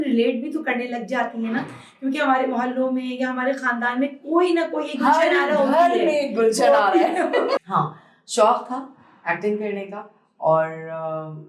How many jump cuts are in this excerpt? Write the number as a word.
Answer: one